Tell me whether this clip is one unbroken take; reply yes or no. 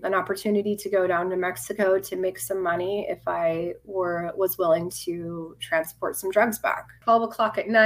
no